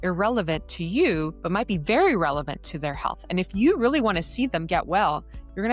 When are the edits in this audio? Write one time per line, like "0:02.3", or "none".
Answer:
0:01.4